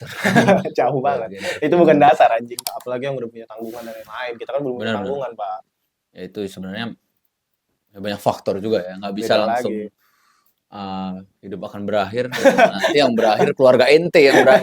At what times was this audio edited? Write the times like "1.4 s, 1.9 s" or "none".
2.7 s